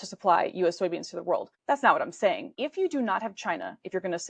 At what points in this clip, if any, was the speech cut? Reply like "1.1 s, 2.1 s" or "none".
1.5 s, 2.5 s